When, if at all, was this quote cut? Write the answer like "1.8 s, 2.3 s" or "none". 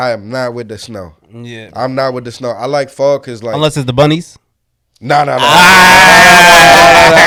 none